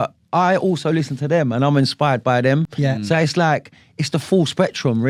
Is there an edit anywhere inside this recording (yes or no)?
no